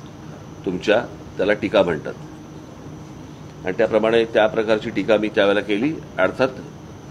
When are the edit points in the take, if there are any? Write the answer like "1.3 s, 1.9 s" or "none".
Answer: none